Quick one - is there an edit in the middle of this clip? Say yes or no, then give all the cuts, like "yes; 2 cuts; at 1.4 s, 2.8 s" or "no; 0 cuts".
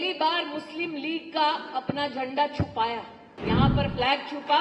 yes; 1 cut; at 3.3 s